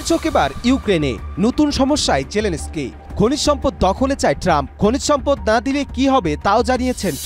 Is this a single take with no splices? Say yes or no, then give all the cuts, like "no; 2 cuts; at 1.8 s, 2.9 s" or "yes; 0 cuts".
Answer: yes; 0 cuts